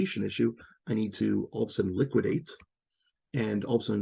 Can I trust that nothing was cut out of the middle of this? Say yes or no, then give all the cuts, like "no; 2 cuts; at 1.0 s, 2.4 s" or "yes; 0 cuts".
yes; 0 cuts